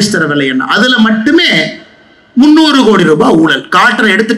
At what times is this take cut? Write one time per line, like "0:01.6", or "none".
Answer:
none